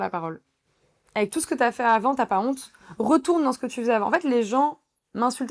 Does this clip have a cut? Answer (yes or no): no